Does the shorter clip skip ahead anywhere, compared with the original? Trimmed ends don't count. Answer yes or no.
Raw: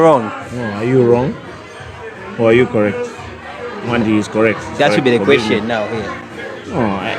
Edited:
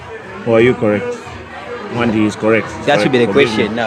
no